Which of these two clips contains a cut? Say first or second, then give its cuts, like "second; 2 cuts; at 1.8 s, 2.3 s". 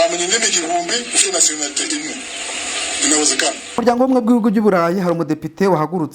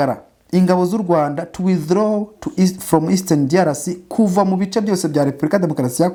first; 1 cut; at 3.6 s